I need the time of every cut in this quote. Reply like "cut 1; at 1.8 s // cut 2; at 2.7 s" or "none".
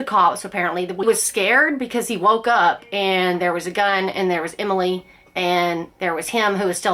cut 1; at 1.0 s